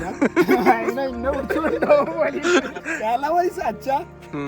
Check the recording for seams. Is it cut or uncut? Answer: cut